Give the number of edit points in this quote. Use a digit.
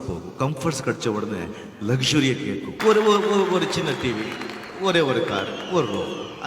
1